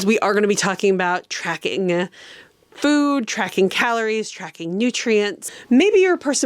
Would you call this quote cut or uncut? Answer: cut